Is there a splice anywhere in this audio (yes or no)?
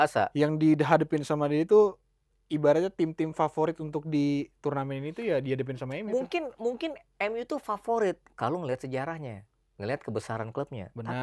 no